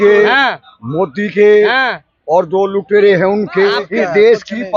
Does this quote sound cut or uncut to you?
cut